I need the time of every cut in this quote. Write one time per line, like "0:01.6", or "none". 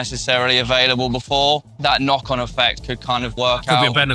0:01.7
0:03.3

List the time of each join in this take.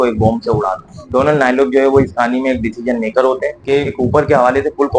0:01.0
0:03.6

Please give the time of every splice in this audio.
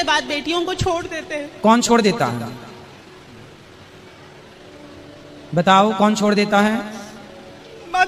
none

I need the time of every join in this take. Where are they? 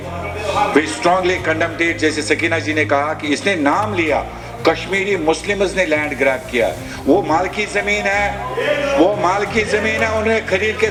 none

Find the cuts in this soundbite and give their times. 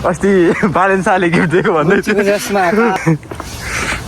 0:03.0

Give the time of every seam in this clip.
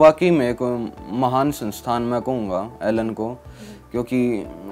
none

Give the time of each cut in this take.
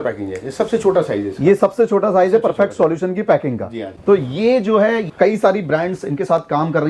none

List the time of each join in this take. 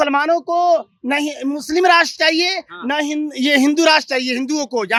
none

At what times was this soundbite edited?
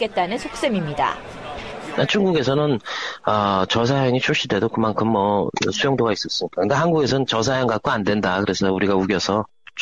0:07.1

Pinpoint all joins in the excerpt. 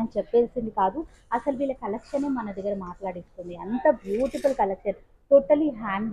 none

